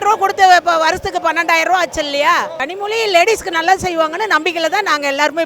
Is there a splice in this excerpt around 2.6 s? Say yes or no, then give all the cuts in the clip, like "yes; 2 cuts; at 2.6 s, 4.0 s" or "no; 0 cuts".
yes; 1 cut; at 2.6 s